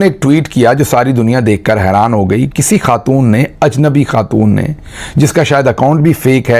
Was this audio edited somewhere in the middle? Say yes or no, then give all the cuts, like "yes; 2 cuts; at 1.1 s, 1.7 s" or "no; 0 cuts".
no; 0 cuts